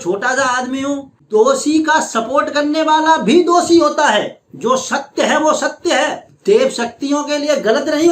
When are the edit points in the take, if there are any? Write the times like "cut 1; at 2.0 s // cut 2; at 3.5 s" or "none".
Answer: cut 1; at 1.1 s